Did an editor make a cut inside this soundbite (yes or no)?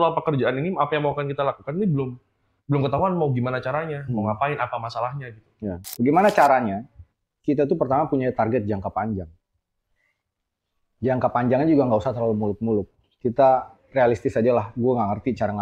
yes